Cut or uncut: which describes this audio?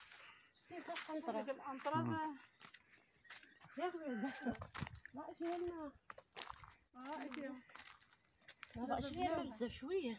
cut